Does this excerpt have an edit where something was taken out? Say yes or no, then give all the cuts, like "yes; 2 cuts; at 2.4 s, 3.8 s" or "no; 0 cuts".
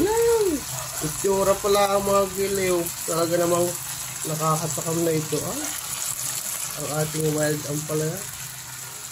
no; 0 cuts